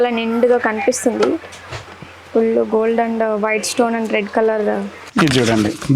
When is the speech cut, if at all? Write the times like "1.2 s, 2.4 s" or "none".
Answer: 5.0 s